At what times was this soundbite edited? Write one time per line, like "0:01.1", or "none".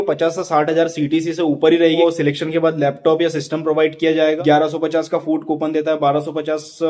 0:02.0
0:04.4